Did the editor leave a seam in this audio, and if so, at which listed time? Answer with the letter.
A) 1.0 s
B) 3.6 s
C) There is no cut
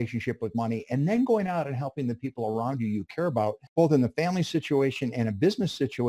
B